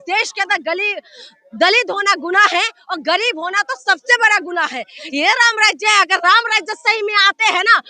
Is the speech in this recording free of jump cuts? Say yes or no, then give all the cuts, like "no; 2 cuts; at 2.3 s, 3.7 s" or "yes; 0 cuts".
no; 1 cut; at 5.0 s